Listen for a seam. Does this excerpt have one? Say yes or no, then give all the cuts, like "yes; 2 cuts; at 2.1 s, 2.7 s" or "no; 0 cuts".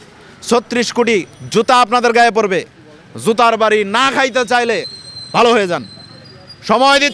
no; 0 cuts